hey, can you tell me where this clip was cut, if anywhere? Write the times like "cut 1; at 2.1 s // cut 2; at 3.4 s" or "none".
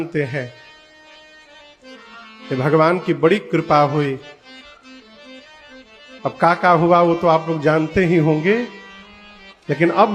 none